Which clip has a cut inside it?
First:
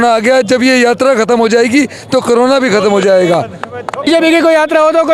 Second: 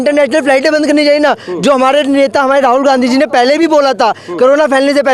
first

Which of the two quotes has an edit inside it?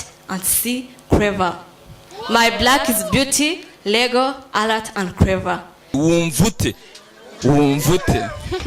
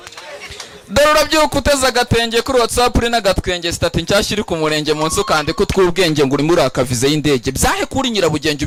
first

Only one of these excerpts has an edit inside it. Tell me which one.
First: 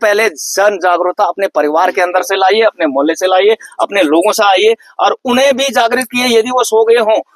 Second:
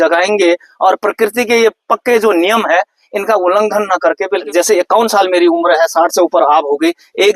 second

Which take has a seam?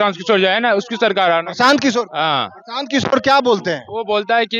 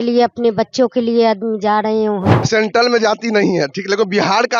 second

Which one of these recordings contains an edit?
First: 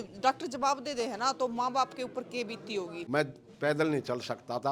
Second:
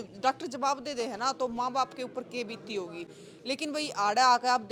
first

